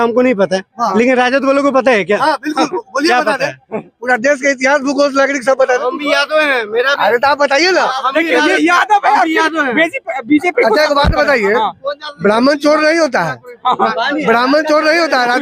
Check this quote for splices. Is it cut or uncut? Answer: uncut